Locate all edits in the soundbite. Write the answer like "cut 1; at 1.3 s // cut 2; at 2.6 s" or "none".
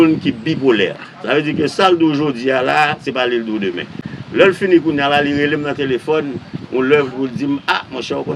none